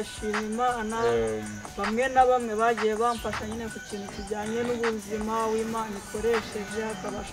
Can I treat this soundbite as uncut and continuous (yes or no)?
yes